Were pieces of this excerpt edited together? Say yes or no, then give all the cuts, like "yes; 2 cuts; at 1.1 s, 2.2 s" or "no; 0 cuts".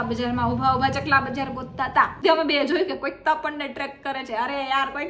yes; 1 cut; at 2.2 s